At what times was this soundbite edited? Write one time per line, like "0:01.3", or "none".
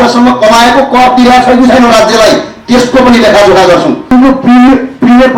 0:04.1